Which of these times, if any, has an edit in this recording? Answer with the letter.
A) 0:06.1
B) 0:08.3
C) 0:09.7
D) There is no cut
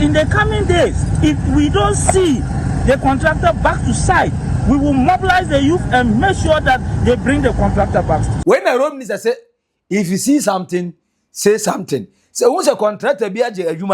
B